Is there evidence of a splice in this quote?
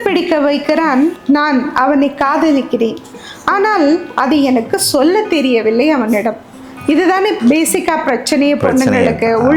no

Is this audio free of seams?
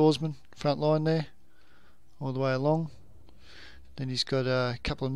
no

